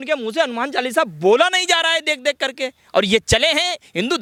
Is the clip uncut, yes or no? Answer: yes